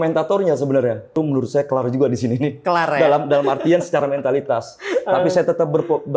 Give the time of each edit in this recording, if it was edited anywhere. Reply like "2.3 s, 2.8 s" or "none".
1.2 s